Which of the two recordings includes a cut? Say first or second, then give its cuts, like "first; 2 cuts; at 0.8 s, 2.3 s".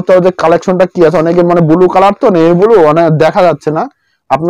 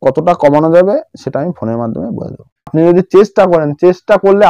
second; 1 cut; at 2.7 s